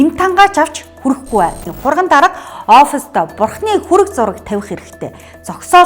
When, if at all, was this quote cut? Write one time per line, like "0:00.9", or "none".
0:01.7